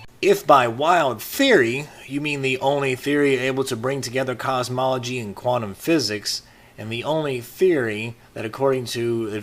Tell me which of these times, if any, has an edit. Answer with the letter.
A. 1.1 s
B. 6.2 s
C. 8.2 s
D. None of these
B